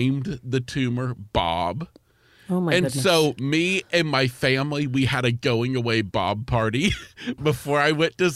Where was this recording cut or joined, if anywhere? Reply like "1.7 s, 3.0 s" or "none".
7.4 s